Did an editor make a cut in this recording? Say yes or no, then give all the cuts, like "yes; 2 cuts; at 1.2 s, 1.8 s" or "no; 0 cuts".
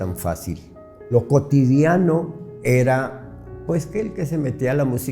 yes; 1 cut; at 1.1 s